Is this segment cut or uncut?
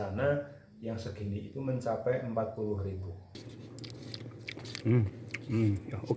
cut